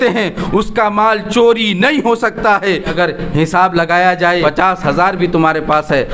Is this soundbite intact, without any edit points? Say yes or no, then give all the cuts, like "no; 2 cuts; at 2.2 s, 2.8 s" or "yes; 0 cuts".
no; 2 cuts; at 2.9 s, 4.4 s